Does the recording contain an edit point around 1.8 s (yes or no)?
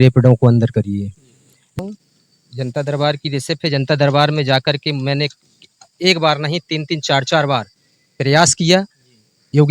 yes